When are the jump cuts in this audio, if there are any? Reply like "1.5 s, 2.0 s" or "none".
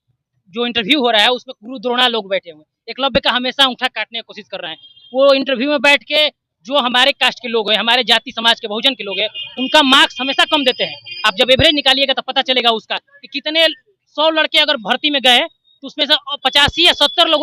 none